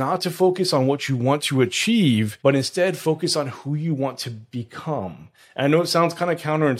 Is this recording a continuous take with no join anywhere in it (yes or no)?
no